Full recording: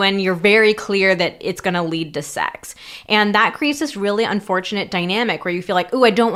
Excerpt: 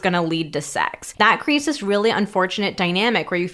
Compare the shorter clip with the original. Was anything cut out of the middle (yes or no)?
yes